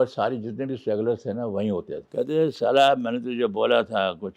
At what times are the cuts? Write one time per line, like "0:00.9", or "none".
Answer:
0:02.0